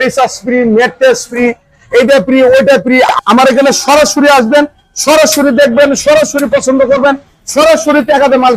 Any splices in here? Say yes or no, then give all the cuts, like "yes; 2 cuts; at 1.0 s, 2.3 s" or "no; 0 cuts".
yes; 1 cut; at 3.1 s